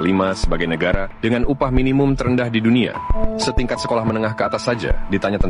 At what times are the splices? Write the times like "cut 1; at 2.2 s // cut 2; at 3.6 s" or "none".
cut 1; at 3.2 s